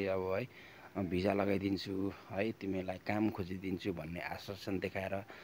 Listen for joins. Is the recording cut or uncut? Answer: uncut